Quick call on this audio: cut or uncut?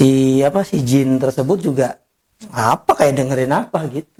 uncut